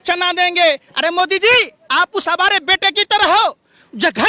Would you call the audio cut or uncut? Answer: uncut